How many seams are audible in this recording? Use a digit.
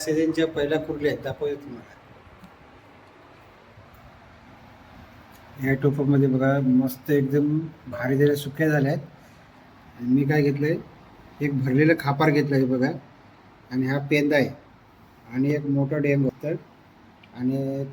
1